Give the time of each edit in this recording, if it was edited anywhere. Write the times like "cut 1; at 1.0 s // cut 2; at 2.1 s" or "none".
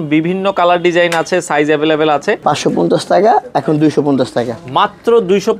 cut 1; at 2.4 s

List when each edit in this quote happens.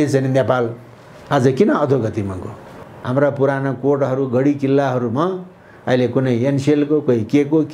cut 1; at 2.9 s

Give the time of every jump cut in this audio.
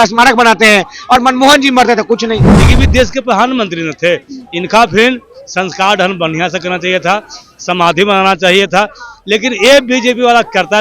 cut 1; at 2.5 s

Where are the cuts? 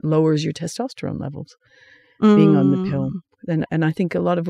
none

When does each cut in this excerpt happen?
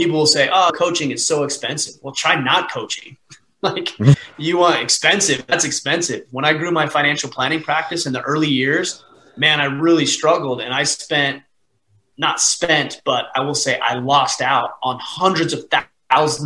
none

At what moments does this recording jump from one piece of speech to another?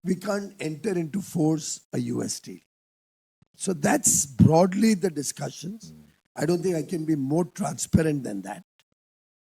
none

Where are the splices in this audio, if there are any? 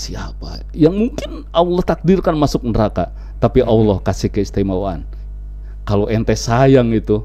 none

